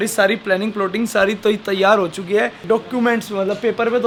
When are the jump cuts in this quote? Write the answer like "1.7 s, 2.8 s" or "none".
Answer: none

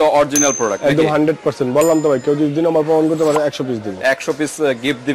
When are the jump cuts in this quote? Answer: none

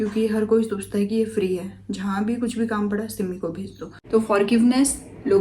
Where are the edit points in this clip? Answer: 4.0 s

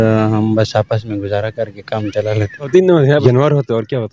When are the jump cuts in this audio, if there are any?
3.2 s

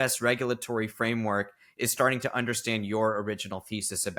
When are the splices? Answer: none

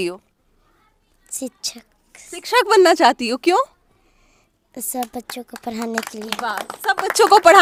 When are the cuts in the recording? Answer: none

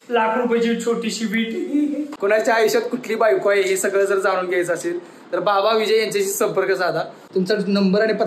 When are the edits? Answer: 2.1 s, 7.2 s

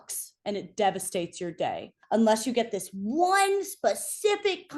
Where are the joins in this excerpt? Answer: 1.9 s

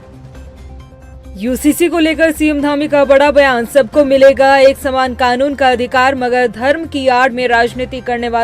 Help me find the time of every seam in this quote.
1.1 s

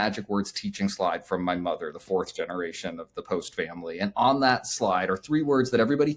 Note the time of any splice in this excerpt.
none

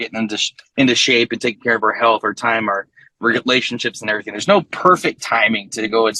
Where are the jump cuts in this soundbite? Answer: none

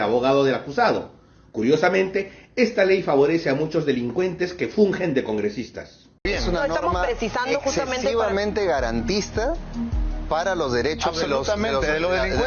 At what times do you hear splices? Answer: 6.2 s

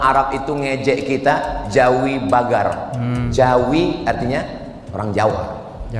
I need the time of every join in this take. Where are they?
none

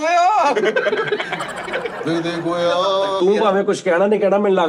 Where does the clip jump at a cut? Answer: 3.2 s

